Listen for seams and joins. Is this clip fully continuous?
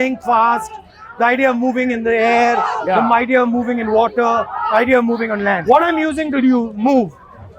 no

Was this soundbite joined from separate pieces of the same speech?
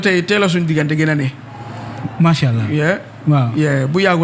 no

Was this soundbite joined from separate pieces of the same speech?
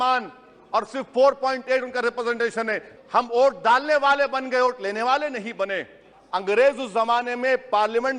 yes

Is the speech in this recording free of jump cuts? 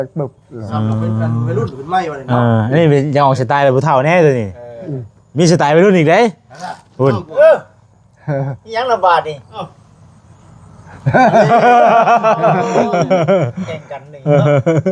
yes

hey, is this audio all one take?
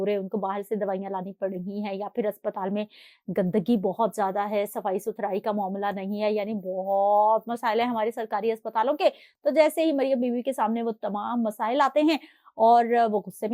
yes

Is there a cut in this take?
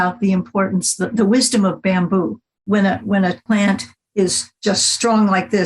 yes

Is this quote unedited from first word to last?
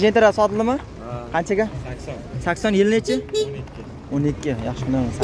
yes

